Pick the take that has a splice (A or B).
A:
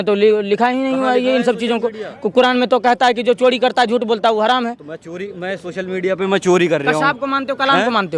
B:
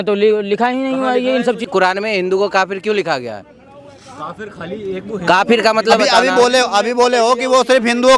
B